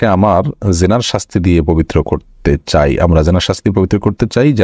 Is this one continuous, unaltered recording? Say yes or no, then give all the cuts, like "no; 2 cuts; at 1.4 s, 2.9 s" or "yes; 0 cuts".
yes; 0 cuts